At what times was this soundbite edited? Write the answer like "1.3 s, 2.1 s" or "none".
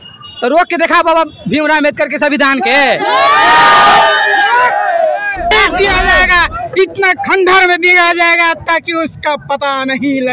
5.5 s